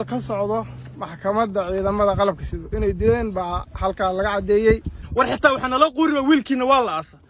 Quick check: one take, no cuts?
no; 1 cut; at 5.0 s

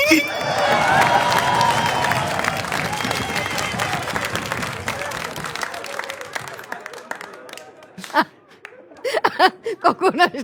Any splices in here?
no; 0 cuts

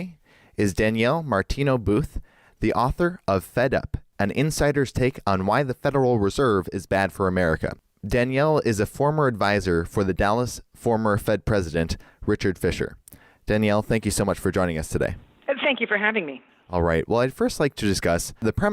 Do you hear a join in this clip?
yes; 2 cuts; at 1.3 s, 15.3 s

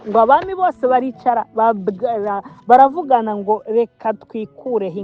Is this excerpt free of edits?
yes; 0 cuts

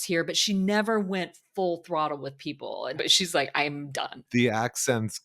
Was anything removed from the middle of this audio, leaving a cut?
yes; 2 cuts; at 3.0 s, 4.3 s

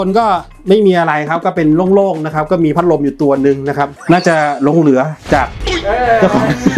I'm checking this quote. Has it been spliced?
yes; 1 cut; at 3.9 s

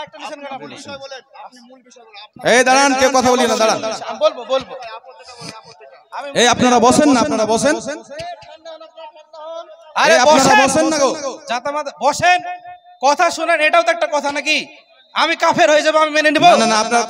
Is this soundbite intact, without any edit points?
yes; 0 cuts

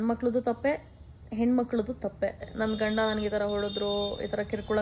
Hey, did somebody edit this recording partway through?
yes; 1 cut; at 2.5 s

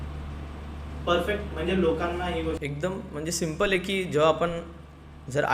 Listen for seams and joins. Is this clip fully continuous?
no; 1 cut; at 2.6 s

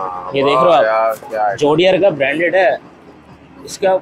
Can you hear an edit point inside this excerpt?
no; 0 cuts

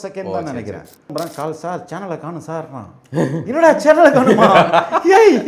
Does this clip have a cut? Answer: yes; 1 cut; at 1.1 s

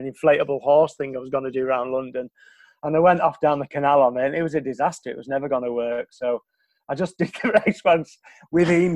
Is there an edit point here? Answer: no; 0 cuts

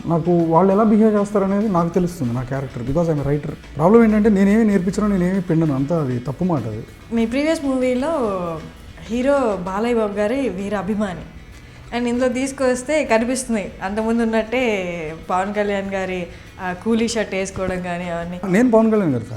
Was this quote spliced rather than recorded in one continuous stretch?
yes; 3 cuts; at 3.6 s, 6.9 s, 18.5 s

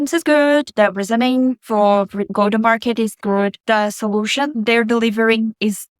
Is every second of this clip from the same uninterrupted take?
no; 2 cuts; at 3.2 s, 4.5 s

